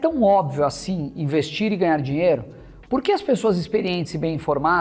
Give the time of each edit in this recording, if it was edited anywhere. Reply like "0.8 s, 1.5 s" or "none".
none